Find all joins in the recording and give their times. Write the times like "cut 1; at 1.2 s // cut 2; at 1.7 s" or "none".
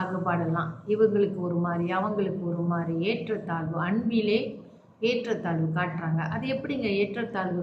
none